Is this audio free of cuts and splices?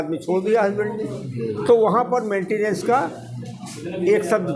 yes; 0 cuts

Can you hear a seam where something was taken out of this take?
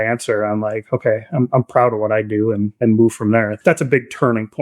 yes; 2 cuts; at 2.7 s, 3.5 s

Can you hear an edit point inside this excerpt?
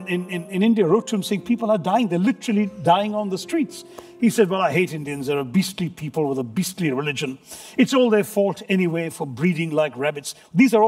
no; 0 cuts

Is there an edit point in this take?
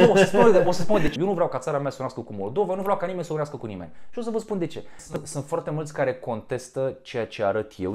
yes; 2 cuts; at 1.1 s, 5.1 s

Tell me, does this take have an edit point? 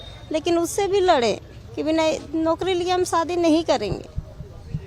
no; 0 cuts

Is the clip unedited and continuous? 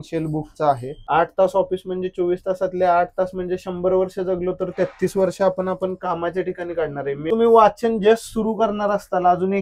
no; 2 cuts; at 0.9 s, 7.3 s

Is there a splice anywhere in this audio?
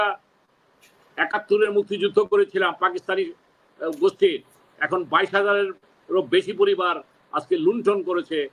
no; 0 cuts

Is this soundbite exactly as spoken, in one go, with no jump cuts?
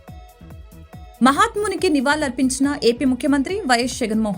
no; 1 cut; at 1.2 s

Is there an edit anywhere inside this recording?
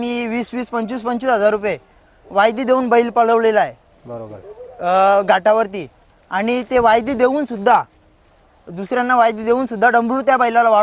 no; 0 cuts

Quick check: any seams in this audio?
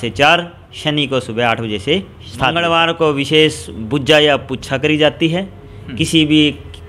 yes; 1 cut; at 2.6 s

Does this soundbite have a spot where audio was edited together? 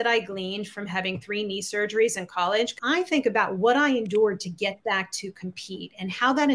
yes; 1 cut; at 2.8 s

